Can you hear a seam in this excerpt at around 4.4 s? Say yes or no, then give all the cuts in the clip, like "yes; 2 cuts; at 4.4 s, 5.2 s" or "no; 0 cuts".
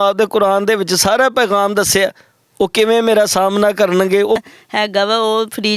yes; 1 cut; at 4.4 s